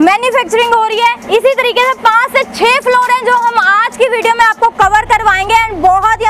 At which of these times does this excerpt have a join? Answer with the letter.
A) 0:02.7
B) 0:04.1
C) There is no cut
C